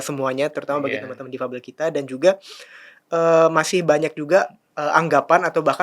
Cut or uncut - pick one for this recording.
uncut